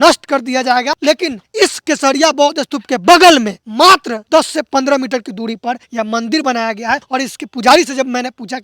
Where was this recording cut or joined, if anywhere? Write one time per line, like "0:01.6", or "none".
0:01.3
0:03.9
0:05.8
0:07.0